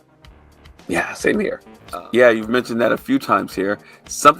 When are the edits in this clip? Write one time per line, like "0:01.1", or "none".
0:01.7